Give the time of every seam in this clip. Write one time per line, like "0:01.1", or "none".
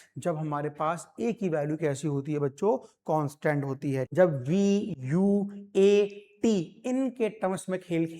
0:04.0

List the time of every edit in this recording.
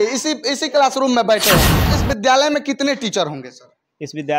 0:01.8

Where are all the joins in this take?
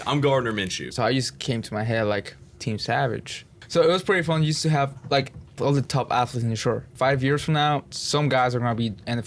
0:00.8
0:03.6
0:05.6
0:06.9
0:07.9

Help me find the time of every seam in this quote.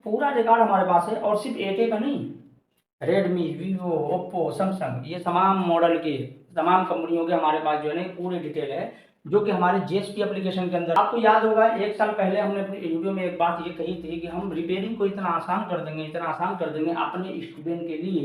0:11.0

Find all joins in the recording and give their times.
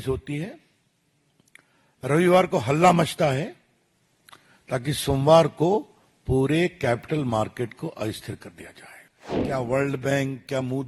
0:09.4

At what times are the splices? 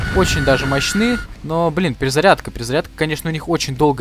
0:01.3

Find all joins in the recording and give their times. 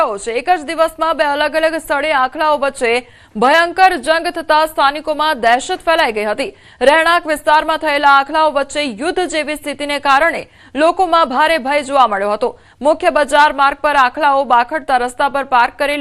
none

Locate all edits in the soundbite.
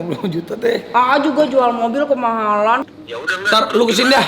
0:02.8

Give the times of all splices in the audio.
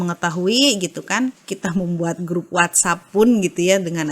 0:01.5

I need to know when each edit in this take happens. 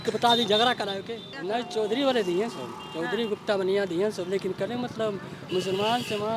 0:01.3

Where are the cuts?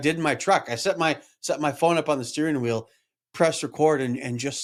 none

